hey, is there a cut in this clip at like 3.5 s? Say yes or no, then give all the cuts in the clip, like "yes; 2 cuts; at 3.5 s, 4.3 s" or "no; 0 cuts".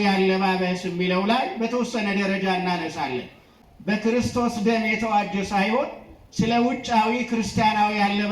yes; 1 cut; at 3.5 s